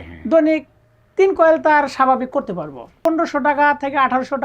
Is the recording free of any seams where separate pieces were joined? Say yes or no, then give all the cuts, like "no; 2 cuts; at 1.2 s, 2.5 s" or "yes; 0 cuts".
no; 1 cut; at 3.0 s